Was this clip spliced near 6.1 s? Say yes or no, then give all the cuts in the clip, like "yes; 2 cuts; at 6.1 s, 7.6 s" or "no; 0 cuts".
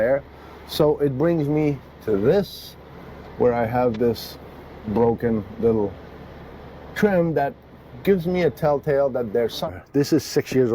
no; 1 cut; at 9.7 s